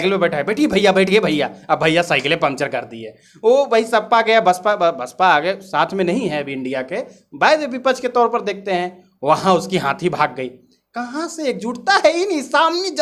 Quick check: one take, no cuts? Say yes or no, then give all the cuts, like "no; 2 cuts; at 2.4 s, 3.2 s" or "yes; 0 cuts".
yes; 0 cuts